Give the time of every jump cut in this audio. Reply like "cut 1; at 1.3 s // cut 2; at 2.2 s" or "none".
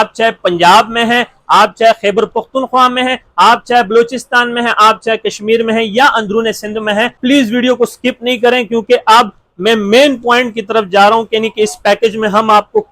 cut 1; at 7.2 s